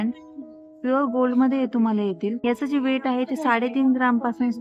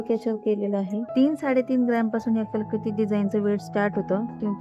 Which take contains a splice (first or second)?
second